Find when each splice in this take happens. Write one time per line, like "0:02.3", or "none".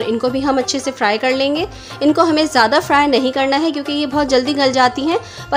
none